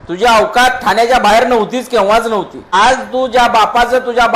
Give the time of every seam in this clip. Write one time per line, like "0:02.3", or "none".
0:02.7